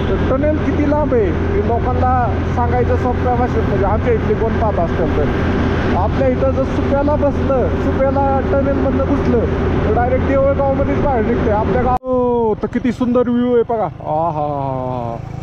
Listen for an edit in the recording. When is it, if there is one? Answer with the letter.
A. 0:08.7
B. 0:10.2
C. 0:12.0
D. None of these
C